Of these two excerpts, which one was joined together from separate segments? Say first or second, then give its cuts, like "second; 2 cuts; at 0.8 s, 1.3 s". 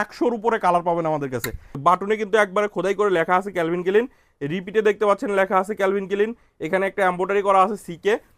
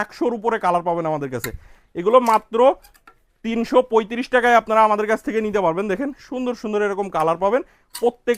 first; 1 cut; at 1.7 s